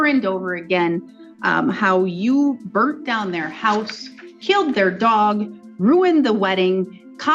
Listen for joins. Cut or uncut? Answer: uncut